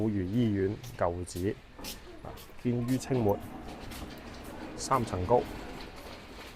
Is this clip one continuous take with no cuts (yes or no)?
yes